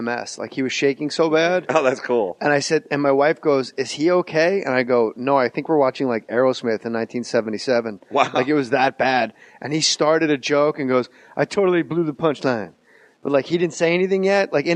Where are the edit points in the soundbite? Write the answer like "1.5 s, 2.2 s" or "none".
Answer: none